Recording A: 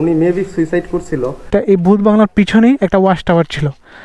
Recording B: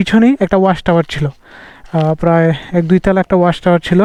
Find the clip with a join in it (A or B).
A